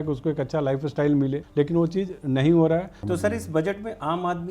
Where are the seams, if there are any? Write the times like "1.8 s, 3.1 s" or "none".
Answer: 1.4 s, 2.9 s